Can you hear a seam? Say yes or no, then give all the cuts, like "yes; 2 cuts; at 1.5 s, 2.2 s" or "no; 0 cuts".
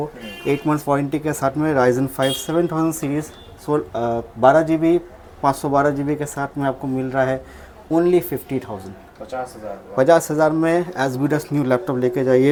no; 0 cuts